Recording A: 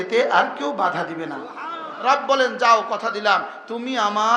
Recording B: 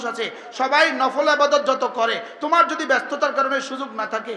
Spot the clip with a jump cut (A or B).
A